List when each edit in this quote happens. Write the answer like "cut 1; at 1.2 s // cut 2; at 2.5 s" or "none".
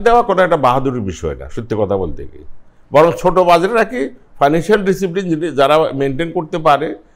none